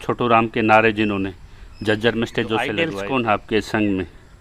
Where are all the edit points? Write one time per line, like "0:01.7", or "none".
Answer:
0:02.9